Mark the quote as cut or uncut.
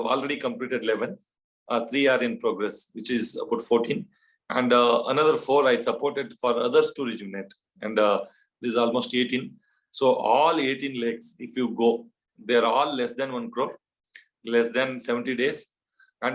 uncut